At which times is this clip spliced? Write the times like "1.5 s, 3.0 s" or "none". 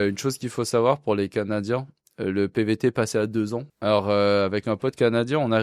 3.7 s